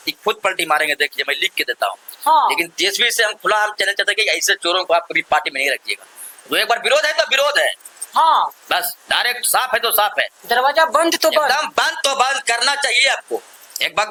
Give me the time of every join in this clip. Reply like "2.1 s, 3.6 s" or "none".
none